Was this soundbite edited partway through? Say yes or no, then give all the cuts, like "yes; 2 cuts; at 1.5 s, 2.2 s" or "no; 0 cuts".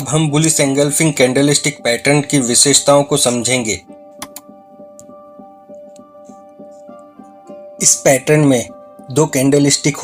no; 0 cuts